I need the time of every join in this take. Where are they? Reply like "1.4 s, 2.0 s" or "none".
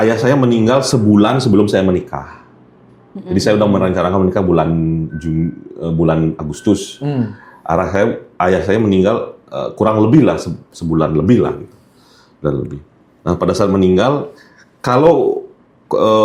none